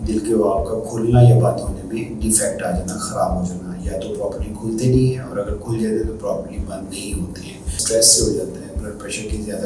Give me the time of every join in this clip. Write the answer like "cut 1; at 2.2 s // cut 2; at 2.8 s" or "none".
cut 1; at 7.8 s